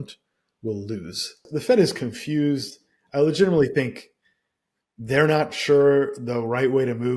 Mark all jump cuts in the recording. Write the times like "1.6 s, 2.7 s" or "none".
1.5 s